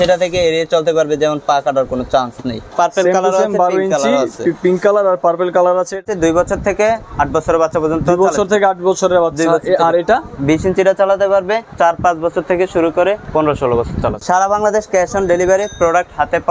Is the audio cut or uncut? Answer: cut